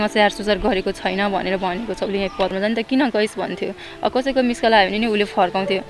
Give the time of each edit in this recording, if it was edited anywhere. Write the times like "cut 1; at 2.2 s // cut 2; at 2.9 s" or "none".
cut 1; at 2.5 s